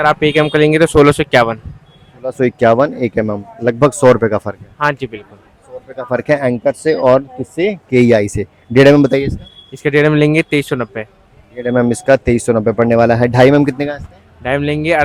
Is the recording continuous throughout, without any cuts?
yes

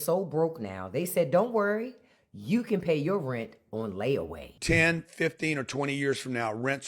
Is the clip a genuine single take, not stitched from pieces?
no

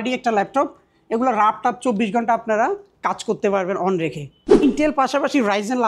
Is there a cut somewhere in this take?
yes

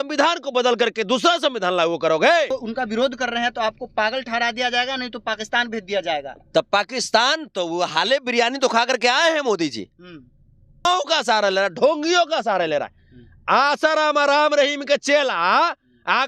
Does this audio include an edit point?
yes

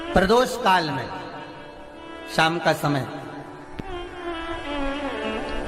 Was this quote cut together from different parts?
no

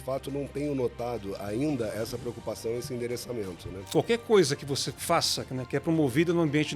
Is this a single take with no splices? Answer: no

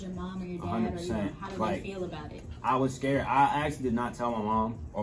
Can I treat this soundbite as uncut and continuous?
yes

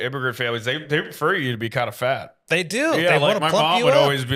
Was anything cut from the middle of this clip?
no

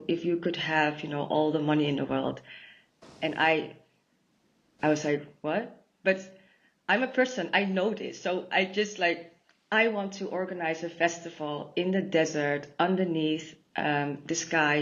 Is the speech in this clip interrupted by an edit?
no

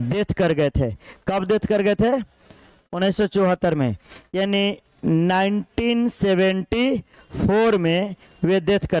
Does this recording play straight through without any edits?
yes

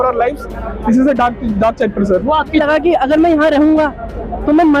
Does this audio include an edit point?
yes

